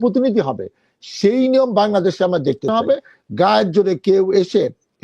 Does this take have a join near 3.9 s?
no; 1 cut; at 2.7 s

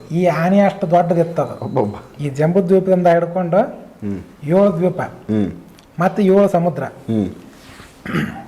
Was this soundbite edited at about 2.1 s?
yes; 1 cut; at 2.1 s

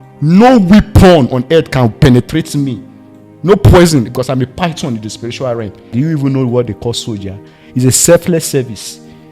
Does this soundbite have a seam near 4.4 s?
no; 1 cut; at 5.9 s

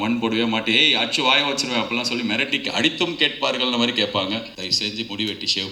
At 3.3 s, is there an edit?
no; 1 cut; at 4.6 s

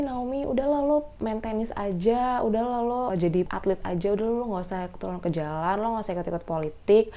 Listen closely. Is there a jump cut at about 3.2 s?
yes; 2 cuts; at 1.1 s, 3.2 s

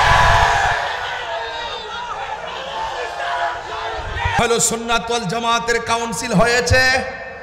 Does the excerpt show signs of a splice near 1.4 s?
no; 1 cut; at 4.4 s

